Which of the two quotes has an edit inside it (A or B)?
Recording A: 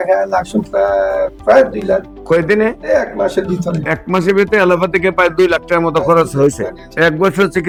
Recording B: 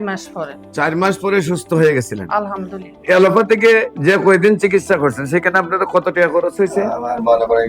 B